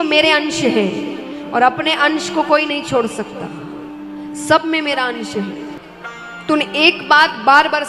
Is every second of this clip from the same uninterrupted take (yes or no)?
no